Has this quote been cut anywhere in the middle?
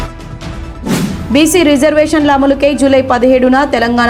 yes; 1 cut; at 0.9 s

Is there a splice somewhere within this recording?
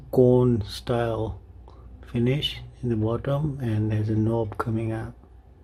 no; 0 cuts

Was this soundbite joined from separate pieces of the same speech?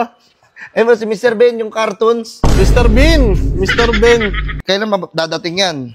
yes; 1 cut; at 4.5 s

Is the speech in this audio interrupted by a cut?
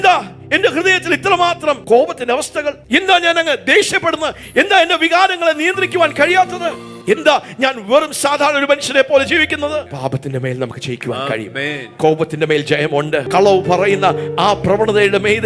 yes; 1 cut; at 9.9 s

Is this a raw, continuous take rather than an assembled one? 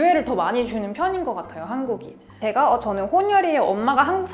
yes; 0 cuts

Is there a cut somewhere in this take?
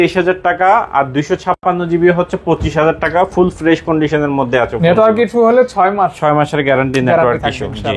no; 0 cuts

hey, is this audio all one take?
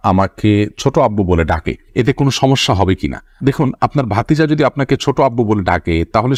yes; 0 cuts

